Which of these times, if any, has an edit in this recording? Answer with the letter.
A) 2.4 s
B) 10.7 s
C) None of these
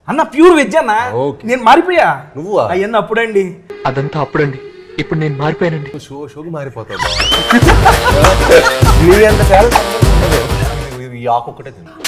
B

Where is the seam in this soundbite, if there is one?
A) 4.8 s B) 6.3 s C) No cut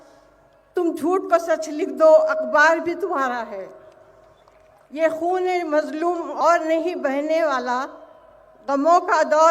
B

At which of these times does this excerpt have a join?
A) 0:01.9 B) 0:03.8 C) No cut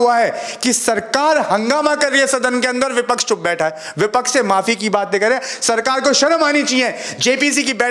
C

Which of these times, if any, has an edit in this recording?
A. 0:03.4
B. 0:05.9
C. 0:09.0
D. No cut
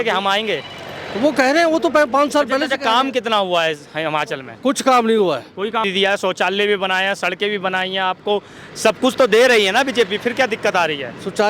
B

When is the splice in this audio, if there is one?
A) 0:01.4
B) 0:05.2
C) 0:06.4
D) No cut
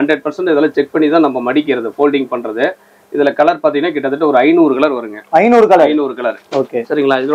D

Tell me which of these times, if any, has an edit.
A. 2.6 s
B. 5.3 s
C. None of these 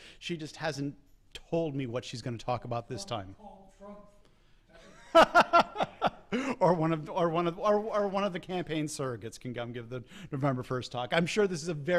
B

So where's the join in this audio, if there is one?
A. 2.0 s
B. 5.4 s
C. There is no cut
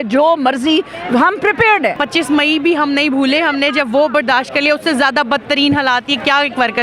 A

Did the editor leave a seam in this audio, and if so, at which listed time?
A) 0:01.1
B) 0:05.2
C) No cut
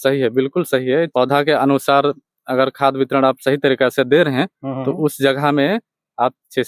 A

